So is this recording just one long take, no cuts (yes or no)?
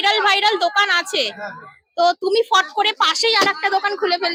yes